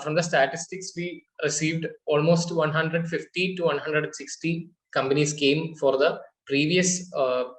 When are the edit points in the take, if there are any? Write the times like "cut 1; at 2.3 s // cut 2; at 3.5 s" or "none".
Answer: none